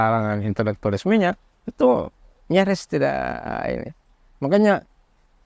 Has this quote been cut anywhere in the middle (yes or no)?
no